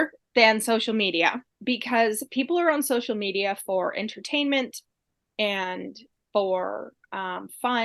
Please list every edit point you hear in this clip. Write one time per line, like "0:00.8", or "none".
0:01.5